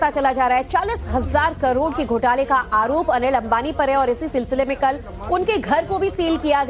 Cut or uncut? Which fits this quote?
cut